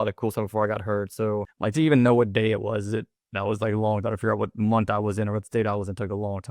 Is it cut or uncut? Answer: cut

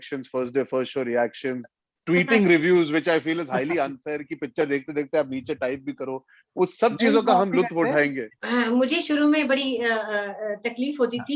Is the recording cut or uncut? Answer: cut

